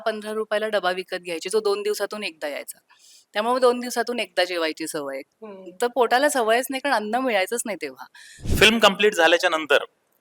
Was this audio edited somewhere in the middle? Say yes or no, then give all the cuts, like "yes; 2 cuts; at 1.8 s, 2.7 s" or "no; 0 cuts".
yes; 1 cut; at 8.4 s